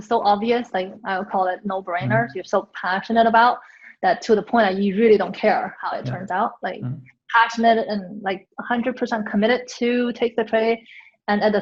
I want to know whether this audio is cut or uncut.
uncut